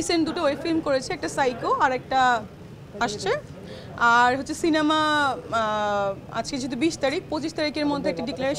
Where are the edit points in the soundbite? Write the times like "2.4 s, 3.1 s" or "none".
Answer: none

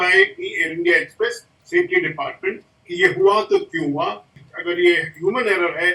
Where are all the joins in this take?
4.4 s

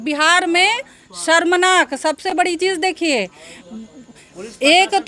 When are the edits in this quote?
none

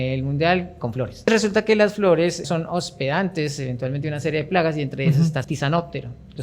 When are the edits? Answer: 1.3 s, 2.4 s, 5.4 s

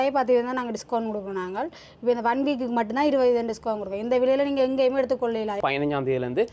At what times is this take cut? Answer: 5.6 s

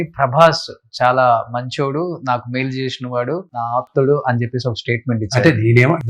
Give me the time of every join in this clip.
3.6 s

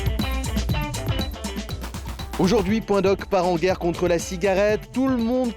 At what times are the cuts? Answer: 2.3 s

